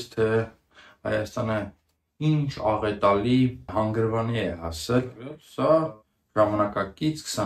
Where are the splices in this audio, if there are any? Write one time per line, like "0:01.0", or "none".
0:03.7
0:05.4